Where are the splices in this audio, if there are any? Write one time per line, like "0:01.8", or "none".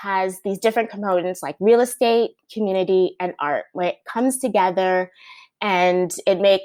none